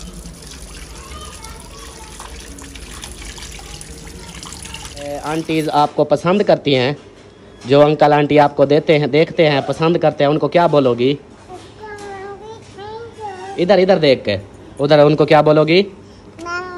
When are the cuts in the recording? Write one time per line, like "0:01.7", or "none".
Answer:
0:05.2

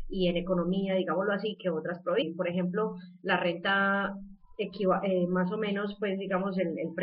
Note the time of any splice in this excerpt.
none

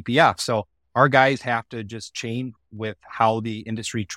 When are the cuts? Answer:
0:02.5

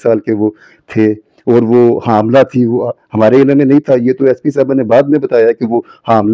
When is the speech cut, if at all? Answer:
none

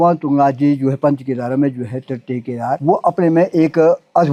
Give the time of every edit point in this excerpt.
none

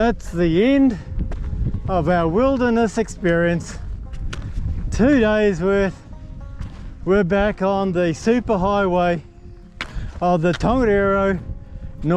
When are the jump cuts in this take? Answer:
none

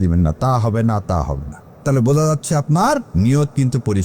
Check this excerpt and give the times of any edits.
0:01.8
0:03.1

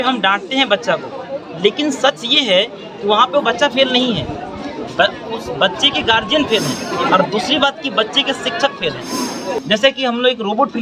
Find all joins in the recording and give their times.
0:06.9
0:09.6

